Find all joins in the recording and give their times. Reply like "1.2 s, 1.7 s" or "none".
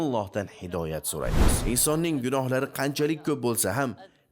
1.5 s